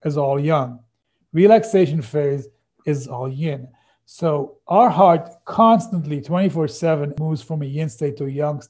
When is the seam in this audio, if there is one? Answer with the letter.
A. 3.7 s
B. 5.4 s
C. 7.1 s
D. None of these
C